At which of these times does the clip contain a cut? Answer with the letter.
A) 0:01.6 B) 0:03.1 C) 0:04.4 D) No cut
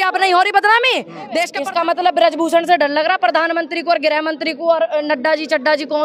A